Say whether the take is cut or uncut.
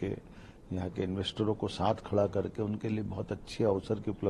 uncut